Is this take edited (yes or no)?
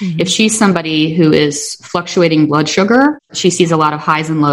yes